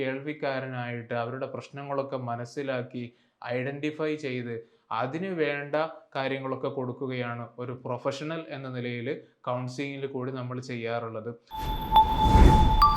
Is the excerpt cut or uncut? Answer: cut